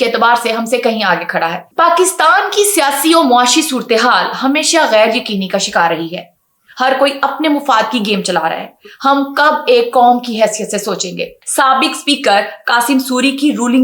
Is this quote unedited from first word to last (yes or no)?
no